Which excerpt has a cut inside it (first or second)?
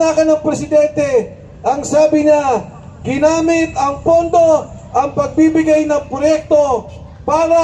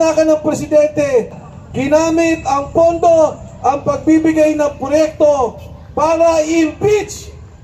second